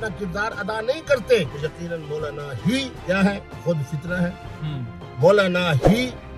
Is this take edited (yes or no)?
yes